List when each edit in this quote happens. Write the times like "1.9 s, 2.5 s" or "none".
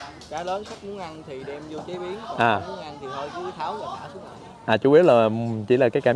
none